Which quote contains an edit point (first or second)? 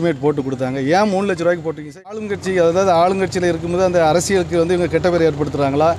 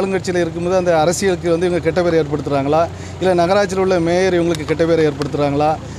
first